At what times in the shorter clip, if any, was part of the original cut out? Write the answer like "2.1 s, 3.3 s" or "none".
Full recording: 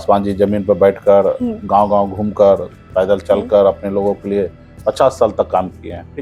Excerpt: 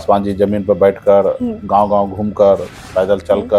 none